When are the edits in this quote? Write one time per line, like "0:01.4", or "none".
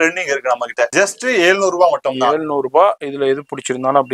none